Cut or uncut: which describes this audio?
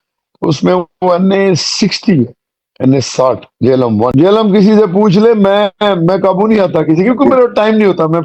cut